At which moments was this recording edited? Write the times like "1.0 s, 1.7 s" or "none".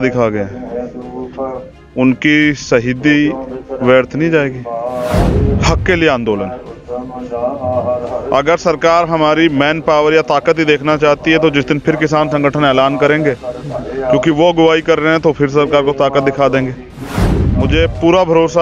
5.4 s, 17.4 s